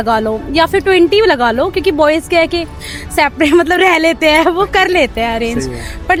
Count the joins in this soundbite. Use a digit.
0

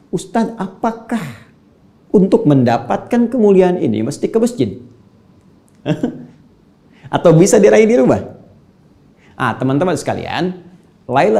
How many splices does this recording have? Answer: 0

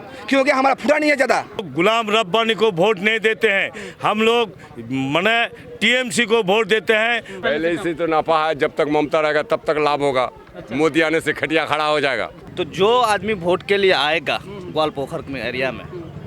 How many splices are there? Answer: 3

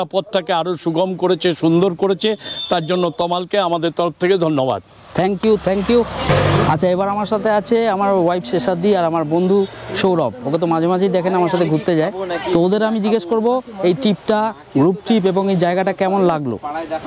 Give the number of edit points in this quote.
1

